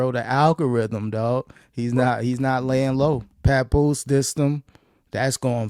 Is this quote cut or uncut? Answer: cut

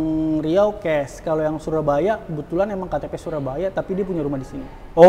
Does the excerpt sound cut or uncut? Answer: uncut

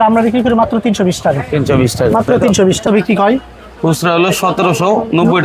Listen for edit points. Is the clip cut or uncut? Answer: cut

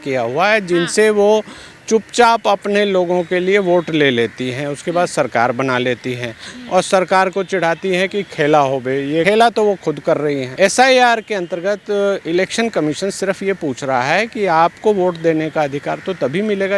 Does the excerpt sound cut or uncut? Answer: cut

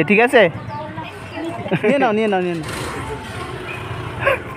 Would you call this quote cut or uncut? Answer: cut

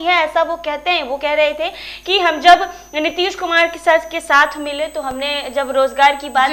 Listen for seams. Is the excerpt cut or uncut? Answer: uncut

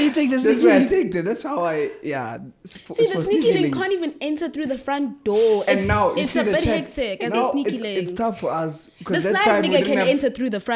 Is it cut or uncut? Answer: uncut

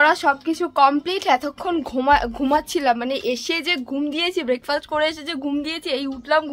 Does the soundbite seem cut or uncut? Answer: uncut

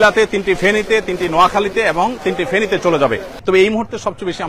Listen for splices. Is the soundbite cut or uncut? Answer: cut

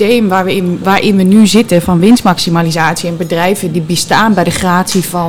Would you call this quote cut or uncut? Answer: uncut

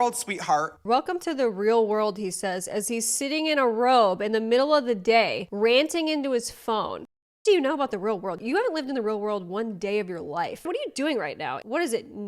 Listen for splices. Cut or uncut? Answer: cut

